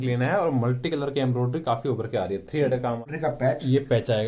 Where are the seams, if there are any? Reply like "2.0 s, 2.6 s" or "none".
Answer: 3.1 s